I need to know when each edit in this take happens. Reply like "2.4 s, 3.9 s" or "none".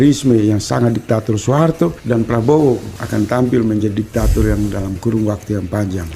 2.0 s, 3.0 s